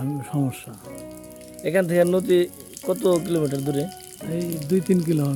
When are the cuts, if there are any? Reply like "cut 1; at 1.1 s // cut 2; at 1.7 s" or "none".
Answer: none